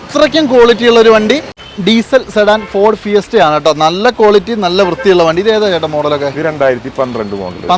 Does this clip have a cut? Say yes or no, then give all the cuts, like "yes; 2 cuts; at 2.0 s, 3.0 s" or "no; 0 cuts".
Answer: yes; 1 cut; at 1.6 s